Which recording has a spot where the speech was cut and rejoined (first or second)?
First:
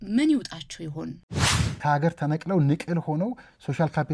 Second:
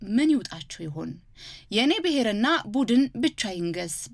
first